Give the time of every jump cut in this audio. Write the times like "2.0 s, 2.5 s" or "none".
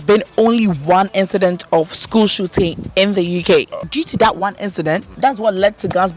3.8 s, 5.1 s

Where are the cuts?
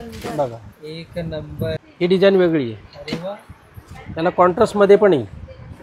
1.8 s

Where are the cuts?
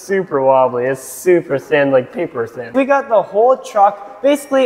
2.7 s

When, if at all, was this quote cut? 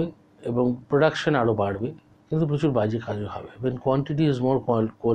2.1 s

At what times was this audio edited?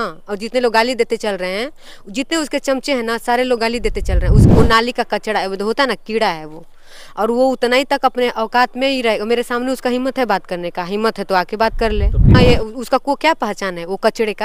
4.5 s, 12.3 s

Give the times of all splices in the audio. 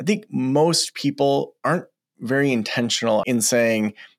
3.2 s

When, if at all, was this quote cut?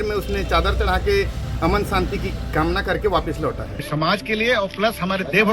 3.8 s

